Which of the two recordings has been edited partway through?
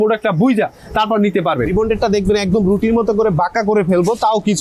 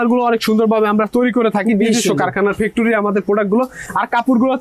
first; 1 cut; at 1.7 s

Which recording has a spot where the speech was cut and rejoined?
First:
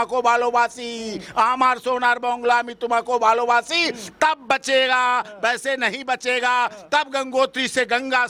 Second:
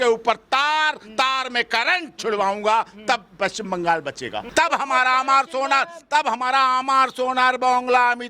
second; 1 cut; at 4.4 s

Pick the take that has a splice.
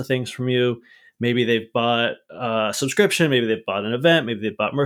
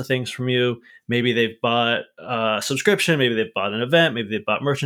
second; 1 cut; at 0.9 s

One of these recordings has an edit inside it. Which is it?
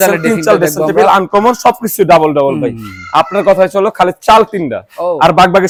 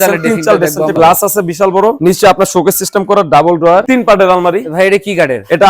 second; 2 cuts; at 0.9 s, 3.8 s

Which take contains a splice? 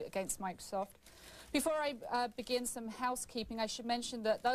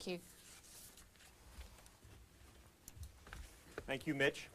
second; 1 cut; at 2.9 s

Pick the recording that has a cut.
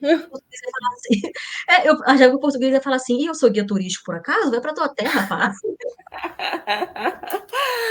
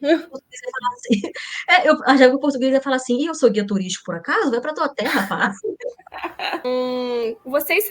second; 1 cut; at 6.6 s

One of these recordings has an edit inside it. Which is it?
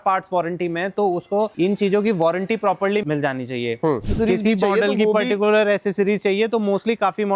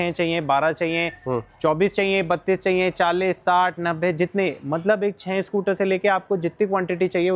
first; 3 cuts; at 1.5 s, 3.0 s, 4.1 s

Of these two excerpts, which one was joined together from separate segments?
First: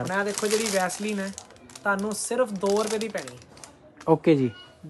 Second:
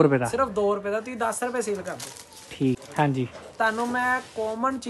second; 1 cut; at 2.8 s

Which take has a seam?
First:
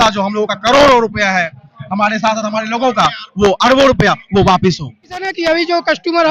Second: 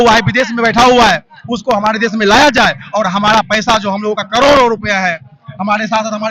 first; 1 cut; at 5.3 s

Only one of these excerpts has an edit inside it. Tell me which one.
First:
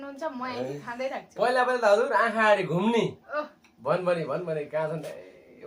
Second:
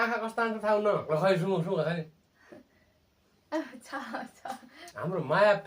second; 2 cuts; at 1.0 s, 4.8 s

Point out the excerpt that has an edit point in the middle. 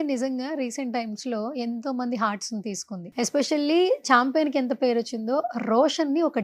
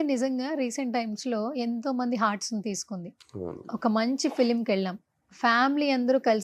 first; 1 cut; at 3.1 s

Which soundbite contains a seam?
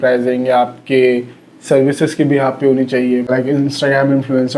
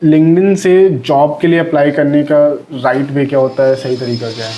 first; 1 cut; at 3.2 s

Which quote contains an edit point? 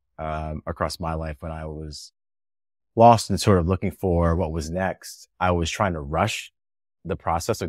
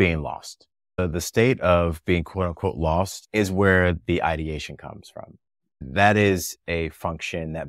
second; 3 cuts; at 1.0 s, 3.2 s, 5.8 s

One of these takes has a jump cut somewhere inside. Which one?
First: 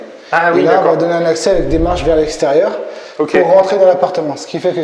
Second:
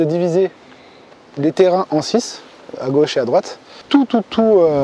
second; 1 cut; at 3.8 s

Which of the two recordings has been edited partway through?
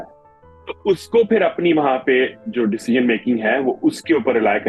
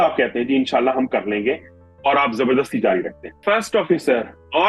second; 1 cut; at 3.2 s

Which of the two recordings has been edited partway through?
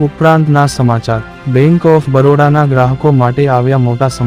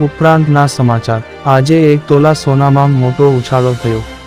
first; 1 cut; at 1.3 s

